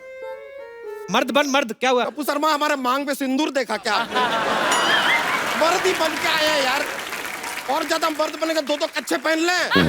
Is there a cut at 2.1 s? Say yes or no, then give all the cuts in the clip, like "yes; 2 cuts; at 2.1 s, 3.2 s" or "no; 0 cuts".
yes; 1 cut; at 2.1 s